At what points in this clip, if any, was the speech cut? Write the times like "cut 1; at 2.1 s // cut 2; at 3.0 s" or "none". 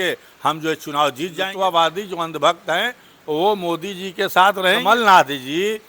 cut 1; at 1.4 s // cut 2; at 4.8 s

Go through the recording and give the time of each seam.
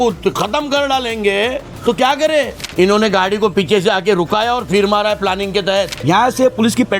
cut 1; at 2.7 s // cut 2; at 6.0 s

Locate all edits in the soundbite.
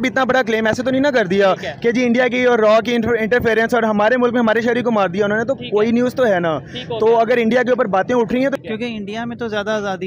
cut 1; at 8.6 s

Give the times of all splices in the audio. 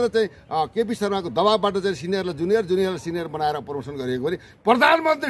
none

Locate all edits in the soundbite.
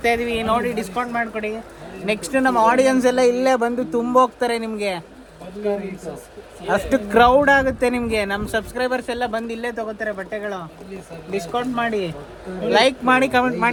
none

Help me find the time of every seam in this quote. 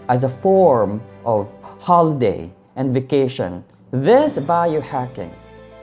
cut 1; at 3.7 s

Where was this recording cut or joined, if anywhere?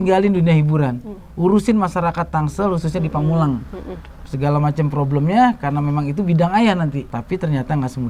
cut 1; at 7.1 s

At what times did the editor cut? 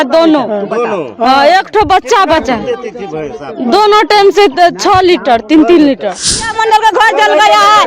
cut 1; at 6.5 s

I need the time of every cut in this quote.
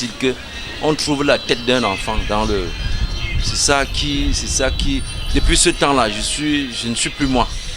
none

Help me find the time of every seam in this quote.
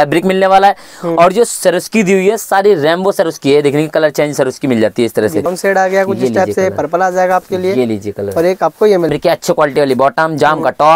cut 1; at 5.5 s // cut 2; at 9.1 s

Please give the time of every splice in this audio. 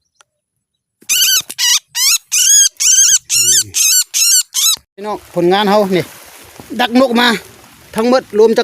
cut 1; at 4.9 s

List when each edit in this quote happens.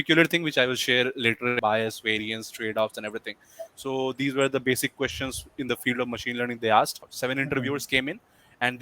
cut 1; at 1.6 s // cut 2; at 7.1 s

